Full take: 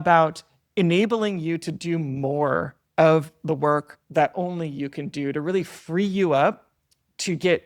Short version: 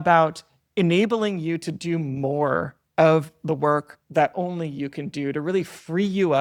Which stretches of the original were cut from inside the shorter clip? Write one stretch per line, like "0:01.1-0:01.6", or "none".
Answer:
none